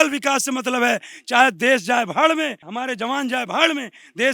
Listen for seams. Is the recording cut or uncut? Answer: cut